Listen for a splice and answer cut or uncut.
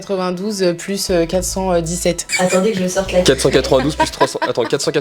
cut